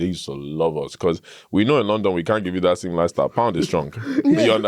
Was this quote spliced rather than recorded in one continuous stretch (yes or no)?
no